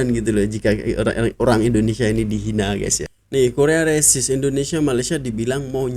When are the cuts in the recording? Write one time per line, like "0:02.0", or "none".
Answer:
0:03.0